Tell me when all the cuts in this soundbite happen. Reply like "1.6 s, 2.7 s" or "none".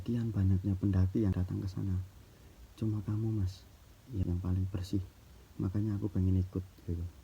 1.3 s, 4.2 s